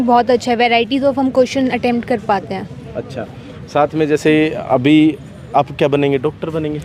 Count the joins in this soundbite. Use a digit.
0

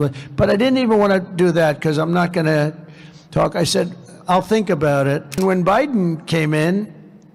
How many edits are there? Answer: 1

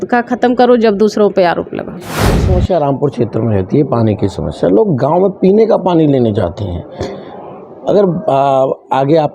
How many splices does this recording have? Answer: 1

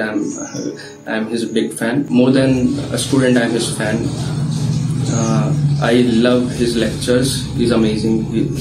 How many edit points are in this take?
1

